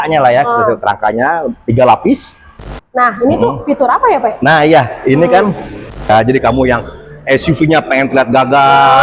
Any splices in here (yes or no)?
yes